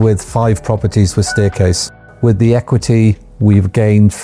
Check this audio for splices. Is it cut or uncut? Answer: cut